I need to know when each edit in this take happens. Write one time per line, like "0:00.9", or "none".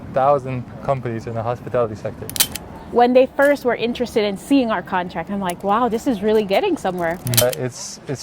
0:02.7
0:07.4